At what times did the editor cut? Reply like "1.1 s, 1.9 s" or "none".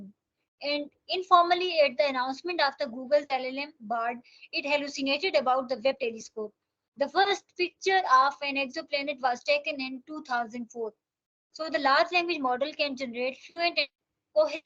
none